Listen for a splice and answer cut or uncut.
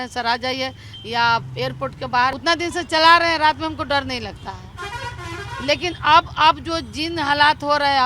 cut